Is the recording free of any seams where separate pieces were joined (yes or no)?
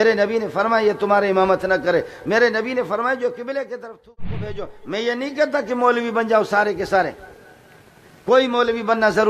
no